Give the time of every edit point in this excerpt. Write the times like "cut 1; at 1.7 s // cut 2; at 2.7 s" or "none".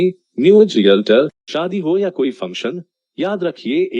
cut 1; at 1.4 s

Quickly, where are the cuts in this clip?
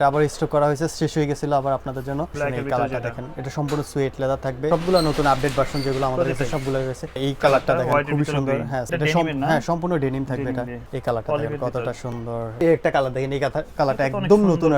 cut 1; at 2.3 s // cut 2; at 4.7 s // cut 3; at 7.2 s // cut 4; at 8.9 s // cut 5; at 10.8 s // cut 6; at 12.6 s

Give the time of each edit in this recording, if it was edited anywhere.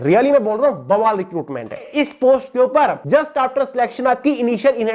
cut 1; at 1.9 s // cut 2; at 3.0 s

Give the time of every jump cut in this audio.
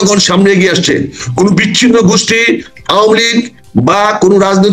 none

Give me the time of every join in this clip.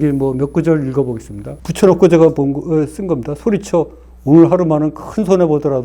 cut 1; at 1.5 s

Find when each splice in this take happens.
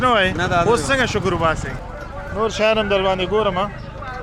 cut 1; at 1.7 s

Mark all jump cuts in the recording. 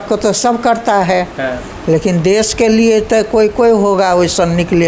none

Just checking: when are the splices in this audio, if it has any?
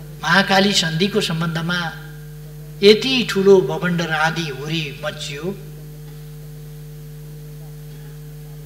none

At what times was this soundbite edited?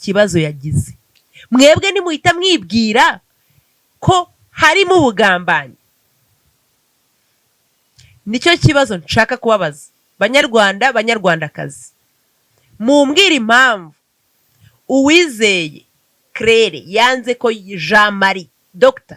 none

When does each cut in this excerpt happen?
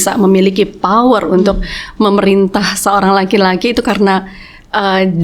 none

